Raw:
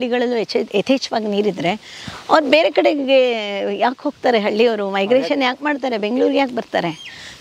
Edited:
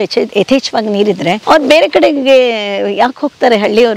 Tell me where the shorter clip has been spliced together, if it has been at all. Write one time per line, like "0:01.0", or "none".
0:01.4